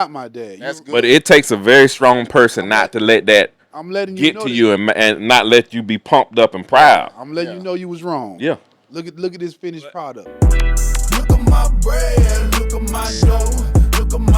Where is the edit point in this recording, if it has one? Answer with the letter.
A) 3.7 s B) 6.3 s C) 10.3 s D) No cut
C